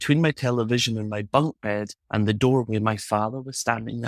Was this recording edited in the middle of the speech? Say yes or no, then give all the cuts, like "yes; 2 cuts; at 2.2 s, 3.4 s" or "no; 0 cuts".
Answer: yes; 1 cut; at 2.0 s